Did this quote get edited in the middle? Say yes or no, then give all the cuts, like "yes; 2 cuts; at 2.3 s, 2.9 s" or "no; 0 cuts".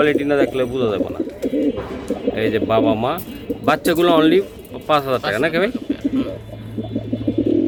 no; 0 cuts